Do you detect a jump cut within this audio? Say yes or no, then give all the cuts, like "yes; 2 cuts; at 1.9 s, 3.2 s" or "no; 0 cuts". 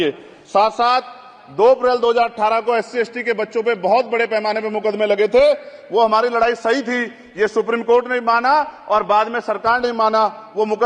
no; 0 cuts